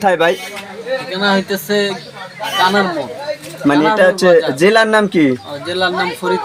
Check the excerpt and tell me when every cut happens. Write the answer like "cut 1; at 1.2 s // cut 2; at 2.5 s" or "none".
none